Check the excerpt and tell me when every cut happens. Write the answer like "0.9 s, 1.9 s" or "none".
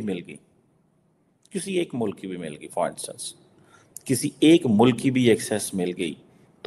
none